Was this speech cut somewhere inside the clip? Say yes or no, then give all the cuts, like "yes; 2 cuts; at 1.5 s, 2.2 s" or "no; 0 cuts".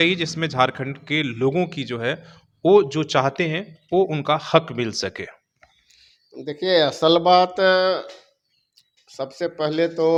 no; 0 cuts